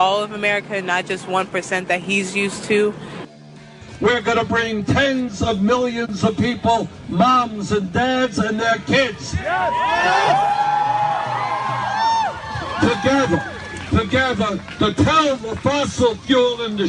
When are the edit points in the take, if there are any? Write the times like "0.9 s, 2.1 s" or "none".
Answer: 3.4 s

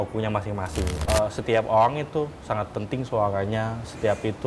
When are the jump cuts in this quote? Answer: 0.9 s

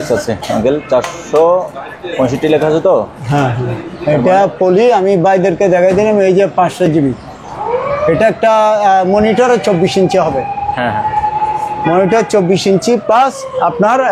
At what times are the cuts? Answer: 7.5 s

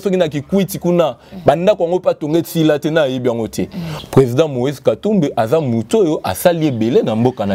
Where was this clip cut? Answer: 3.9 s

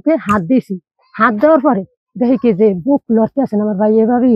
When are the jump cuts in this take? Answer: none

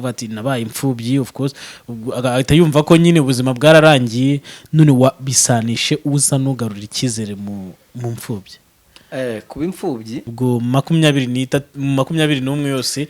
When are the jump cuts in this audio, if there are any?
10.3 s

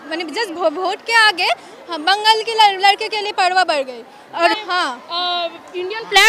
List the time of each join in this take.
4.6 s

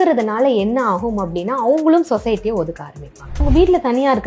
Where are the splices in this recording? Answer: 3.4 s

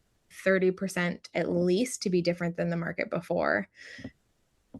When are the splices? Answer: none

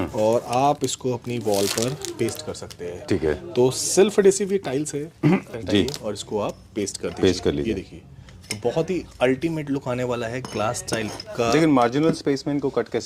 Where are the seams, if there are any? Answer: 5.5 s

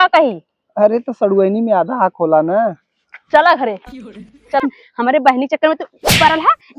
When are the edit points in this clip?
4.6 s

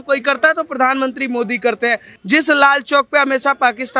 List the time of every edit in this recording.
2.1 s

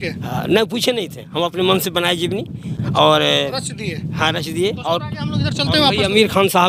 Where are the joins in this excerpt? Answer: none

